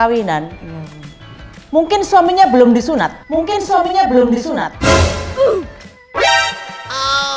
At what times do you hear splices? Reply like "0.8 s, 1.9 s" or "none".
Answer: none